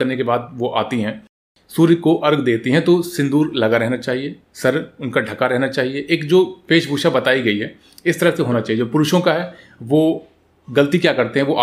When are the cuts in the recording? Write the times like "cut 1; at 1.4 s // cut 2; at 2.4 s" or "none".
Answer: none